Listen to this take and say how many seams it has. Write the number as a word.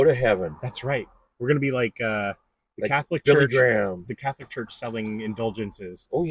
zero